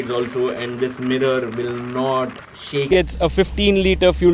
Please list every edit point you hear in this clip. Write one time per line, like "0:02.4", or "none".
0:02.9